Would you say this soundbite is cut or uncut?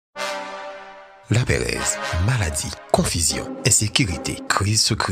cut